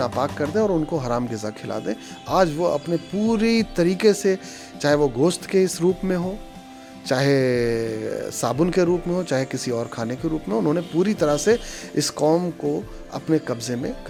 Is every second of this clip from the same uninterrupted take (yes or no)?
yes